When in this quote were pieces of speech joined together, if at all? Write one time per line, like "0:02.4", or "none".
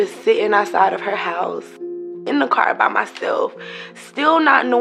none